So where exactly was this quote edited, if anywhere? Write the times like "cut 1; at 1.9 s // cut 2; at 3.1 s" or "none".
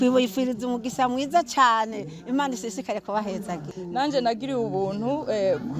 cut 1; at 3.8 s